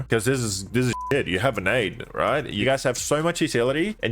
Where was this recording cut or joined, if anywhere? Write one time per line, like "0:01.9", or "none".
0:02.6